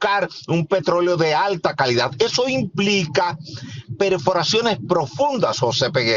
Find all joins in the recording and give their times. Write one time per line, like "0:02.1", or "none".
none